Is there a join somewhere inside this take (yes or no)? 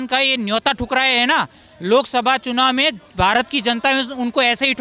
no